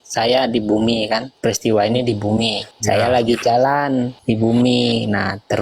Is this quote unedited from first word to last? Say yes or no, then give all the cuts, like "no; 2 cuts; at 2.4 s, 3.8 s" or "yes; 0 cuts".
no; 3 cuts; at 1.3 s, 2.7 s, 4.2 s